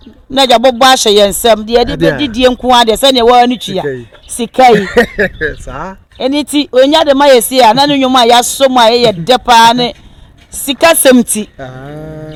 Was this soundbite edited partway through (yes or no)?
no